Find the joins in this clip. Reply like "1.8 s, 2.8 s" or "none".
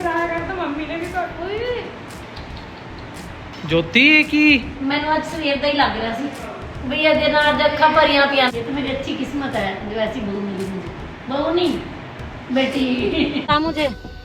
8.5 s, 13.5 s